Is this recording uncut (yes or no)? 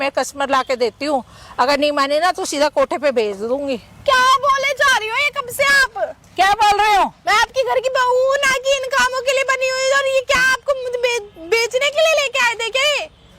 yes